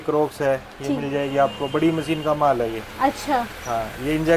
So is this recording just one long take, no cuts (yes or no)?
yes